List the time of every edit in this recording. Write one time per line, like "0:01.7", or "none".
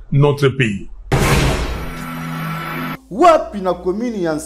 0:00.9
0:02.9